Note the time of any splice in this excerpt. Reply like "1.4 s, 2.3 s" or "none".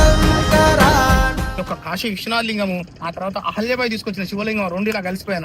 1.6 s